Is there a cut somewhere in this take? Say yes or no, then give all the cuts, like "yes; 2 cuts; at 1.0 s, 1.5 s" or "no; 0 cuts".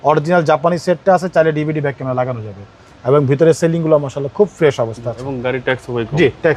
no; 0 cuts